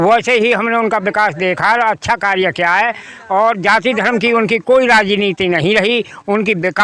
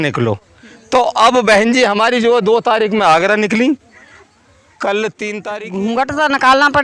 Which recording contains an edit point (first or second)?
second